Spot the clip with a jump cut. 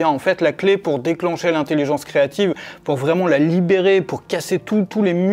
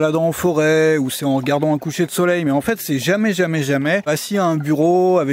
second; 1 cut; at 4.1 s

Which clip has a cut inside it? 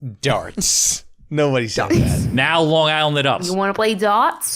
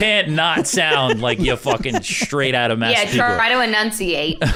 first; 1 cut; at 3.4 s

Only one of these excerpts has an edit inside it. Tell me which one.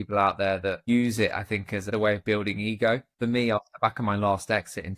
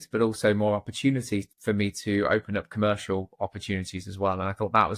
first; 3 cuts; at 0.8 s, 1.8 s, 3.1 s

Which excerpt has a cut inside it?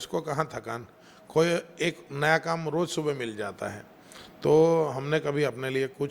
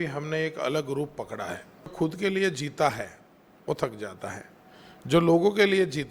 second; 1 cut; at 1.9 s

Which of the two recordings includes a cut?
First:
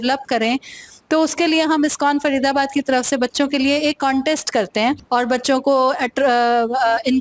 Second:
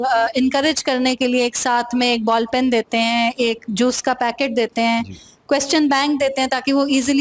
first; 1 cut; at 5.0 s

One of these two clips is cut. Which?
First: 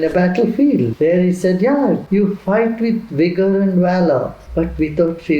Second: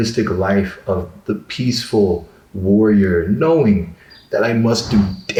first; 3 cuts; at 0.9 s, 2.0 s, 4.4 s

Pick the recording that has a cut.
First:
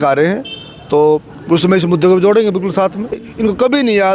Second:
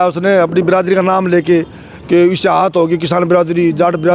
first; 1 cut; at 3.3 s

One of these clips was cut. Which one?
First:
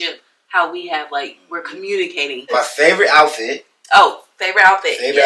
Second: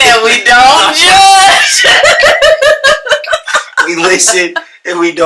first; 1 cut; at 2.5 s

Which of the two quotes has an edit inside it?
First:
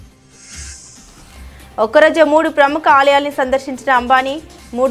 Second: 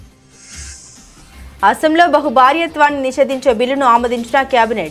first; 1 cut; at 1.6 s

